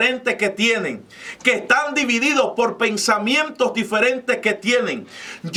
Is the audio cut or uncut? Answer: uncut